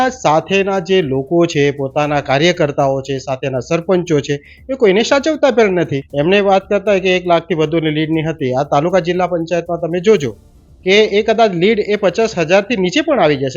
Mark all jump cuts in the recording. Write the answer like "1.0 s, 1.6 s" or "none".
6.0 s